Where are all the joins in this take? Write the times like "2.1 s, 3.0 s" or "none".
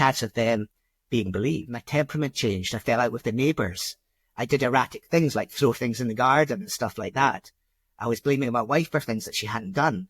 1.8 s